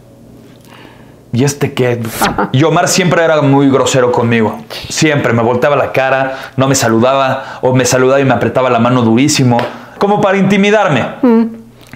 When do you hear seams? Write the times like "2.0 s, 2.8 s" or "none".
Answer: 2.1 s, 9.9 s

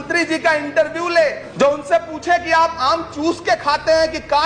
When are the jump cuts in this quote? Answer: 1.4 s

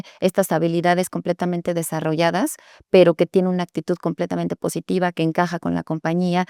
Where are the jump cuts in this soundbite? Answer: none

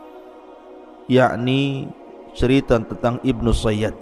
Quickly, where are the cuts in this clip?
1.0 s

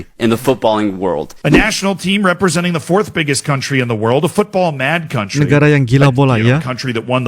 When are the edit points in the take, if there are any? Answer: 1.3 s

